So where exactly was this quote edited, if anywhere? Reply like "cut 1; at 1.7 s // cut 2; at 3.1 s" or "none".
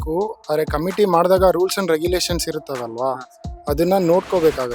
none